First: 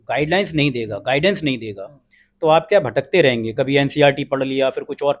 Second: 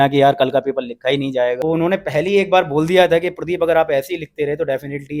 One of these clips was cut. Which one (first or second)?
second